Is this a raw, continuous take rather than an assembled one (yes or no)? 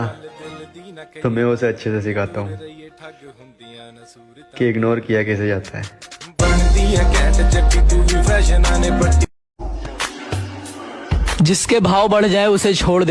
no